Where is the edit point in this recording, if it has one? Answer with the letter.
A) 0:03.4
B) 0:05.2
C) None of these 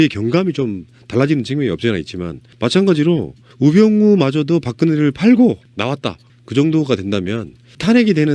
B